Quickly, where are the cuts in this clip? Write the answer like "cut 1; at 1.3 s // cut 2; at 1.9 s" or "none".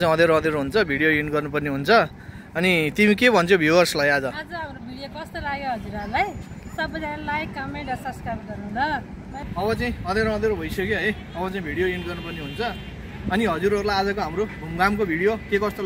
none